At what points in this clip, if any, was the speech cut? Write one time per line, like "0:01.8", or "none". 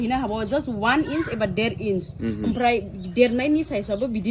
none